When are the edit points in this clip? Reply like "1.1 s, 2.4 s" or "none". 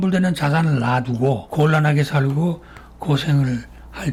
none